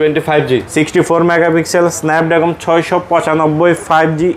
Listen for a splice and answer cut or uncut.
uncut